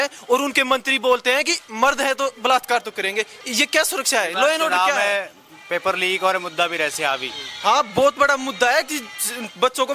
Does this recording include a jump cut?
no; 0 cuts

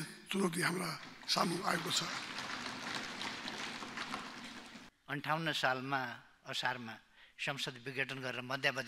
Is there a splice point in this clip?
yes; 1 cut; at 4.9 s

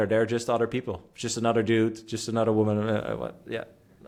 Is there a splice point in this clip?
no; 0 cuts

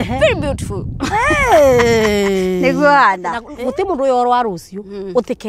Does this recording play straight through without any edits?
no; 1 cut; at 3.4 s

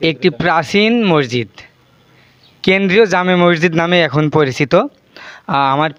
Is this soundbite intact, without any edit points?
yes; 0 cuts

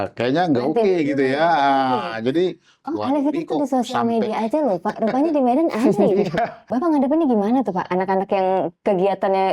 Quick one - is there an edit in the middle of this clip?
yes; 1 cut; at 6.6 s

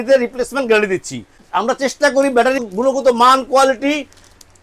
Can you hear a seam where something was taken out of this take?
yes; 2 cuts; at 1.4 s, 2.6 s

